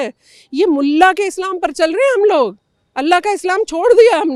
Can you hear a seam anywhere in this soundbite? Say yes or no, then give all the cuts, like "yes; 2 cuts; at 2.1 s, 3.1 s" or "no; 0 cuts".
no; 0 cuts